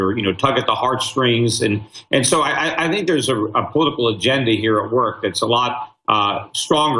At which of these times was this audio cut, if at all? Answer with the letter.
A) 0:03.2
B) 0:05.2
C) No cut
C